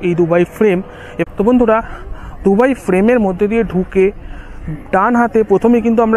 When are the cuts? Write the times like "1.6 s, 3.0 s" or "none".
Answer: 1.1 s